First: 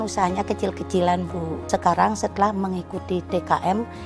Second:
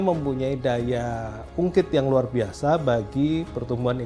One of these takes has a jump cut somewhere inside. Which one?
first; 1 cut; at 1.6 s

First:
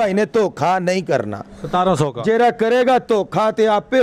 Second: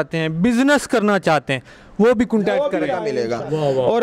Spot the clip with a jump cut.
second; 1 cut; at 3.0 s

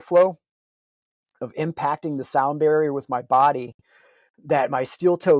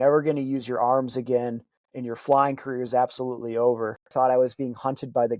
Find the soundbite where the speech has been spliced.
second; 1 cut; at 4.1 s

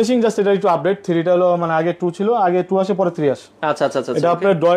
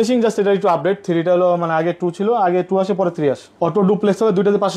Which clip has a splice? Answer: second; 1 cut; at 3.5 s

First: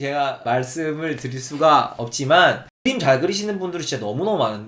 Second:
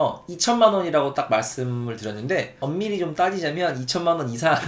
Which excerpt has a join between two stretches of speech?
first; 1 cut; at 2.7 s

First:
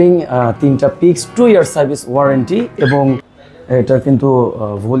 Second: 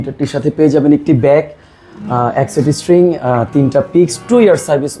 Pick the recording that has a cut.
first; 1 cut; at 3.3 s

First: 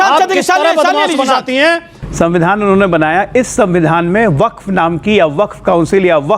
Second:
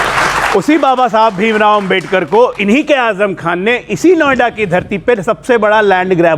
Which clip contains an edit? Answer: first; 1 cut; at 1.9 s

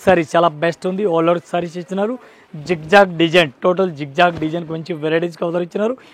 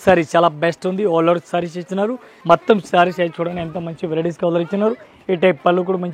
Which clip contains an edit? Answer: second; 1 cut; at 2.3 s

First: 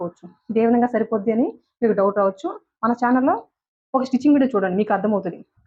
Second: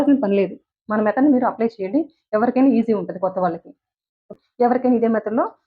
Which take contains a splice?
second; 1 cut; at 4.3 s

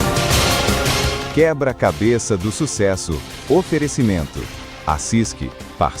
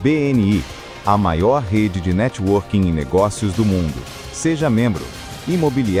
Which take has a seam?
first; 1 cut; at 1.0 s

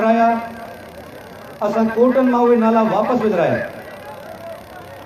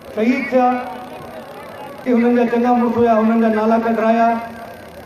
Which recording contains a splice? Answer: second; 1 cut; at 1.9 s

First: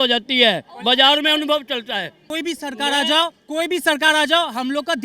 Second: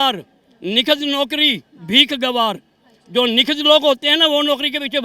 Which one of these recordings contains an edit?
first; 1 cut; at 2.2 s

